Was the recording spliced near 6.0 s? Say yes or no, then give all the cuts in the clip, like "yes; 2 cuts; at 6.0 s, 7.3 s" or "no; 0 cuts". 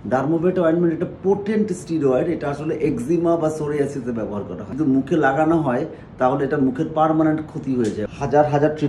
no; 2 cuts; at 4.7 s, 8.0 s